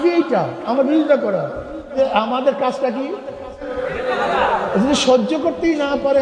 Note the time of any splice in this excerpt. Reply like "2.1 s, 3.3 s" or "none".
1.9 s, 3.8 s